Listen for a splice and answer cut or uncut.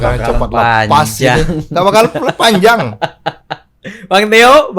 uncut